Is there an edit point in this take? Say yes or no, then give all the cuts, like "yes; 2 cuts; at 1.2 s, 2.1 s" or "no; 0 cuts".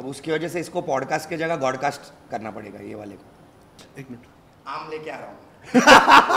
yes; 1 cut; at 3.8 s